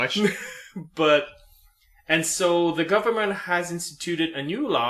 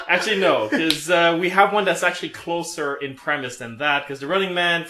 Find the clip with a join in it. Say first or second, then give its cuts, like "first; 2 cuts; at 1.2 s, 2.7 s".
second; 1 cut; at 2.5 s